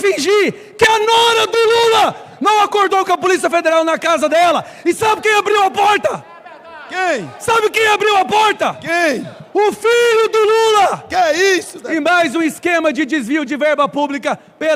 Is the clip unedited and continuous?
yes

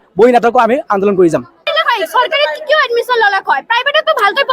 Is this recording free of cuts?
no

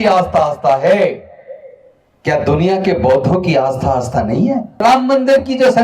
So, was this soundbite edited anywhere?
yes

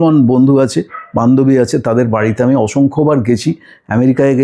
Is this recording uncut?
yes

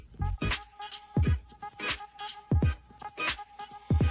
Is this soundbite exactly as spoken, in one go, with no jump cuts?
yes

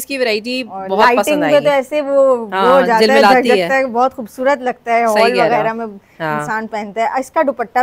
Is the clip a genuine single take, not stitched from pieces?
yes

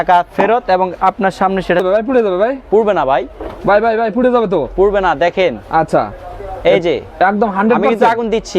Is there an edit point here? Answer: yes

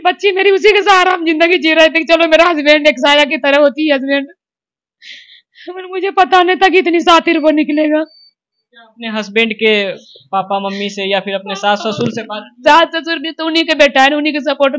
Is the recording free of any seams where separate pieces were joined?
yes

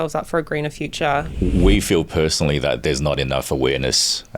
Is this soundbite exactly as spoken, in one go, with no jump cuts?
no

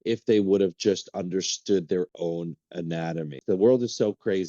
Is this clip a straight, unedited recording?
no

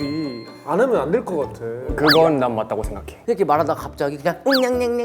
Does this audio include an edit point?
yes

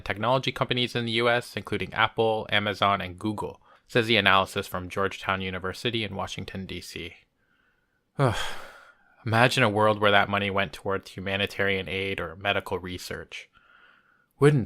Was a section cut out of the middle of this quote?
yes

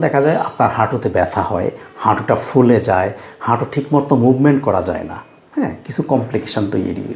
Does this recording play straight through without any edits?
yes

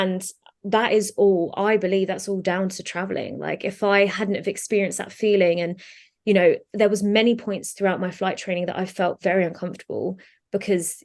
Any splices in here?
no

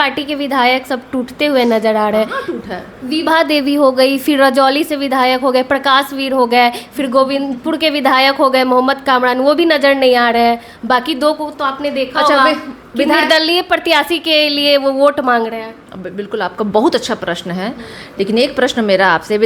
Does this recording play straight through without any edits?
yes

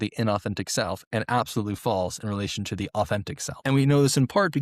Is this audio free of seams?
no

